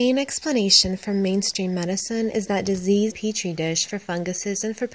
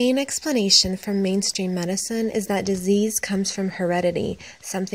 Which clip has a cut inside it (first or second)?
second